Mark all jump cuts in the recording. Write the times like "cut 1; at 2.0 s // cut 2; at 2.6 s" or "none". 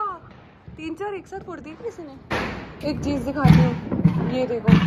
none